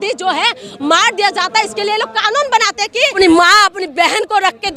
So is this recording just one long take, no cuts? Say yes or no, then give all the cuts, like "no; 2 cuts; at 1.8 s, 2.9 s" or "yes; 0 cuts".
no; 1 cut; at 3.1 s